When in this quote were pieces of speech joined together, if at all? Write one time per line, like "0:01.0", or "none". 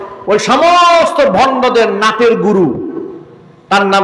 none